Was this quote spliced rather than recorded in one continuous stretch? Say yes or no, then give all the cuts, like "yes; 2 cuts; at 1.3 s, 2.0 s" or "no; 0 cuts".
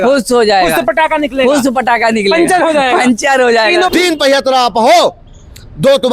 yes; 1 cut; at 3.9 s